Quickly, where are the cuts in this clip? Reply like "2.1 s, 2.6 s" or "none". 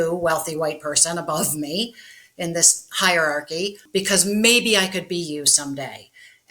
3.8 s